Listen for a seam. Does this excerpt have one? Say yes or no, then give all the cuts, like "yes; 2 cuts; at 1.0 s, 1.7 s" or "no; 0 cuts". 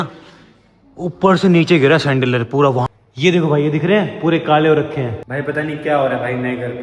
yes; 2 cuts; at 2.8 s, 5.2 s